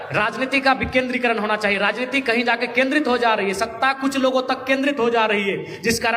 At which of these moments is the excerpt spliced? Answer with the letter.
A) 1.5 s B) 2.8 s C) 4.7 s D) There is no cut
D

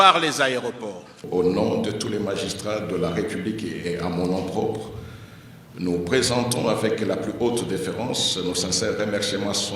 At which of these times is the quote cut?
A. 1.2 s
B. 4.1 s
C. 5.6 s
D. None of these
A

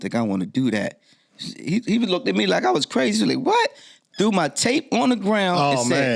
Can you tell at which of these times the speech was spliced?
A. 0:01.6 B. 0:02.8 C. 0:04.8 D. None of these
D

